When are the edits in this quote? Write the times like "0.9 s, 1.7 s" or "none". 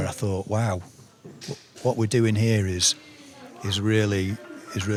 none